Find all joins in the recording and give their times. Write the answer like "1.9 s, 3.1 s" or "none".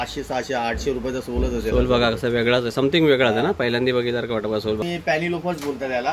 4.9 s